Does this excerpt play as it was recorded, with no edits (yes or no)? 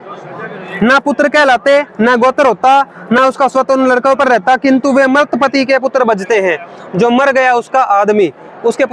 yes